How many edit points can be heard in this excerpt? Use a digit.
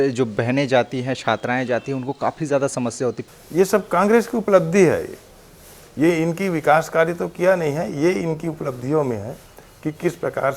1